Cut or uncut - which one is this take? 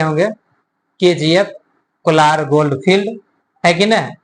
uncut